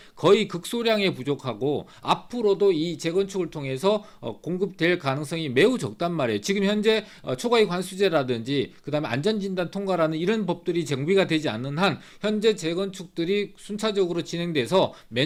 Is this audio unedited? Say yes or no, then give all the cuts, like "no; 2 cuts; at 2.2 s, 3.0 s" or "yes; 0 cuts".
yes; 0 cuts